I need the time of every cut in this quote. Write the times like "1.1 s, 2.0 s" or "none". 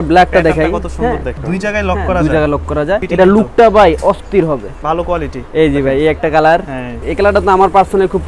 1.3 s, 3.1 s, 4.7 s, 7.0 s